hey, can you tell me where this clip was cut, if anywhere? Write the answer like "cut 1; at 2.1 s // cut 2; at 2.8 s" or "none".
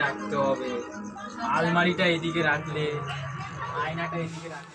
none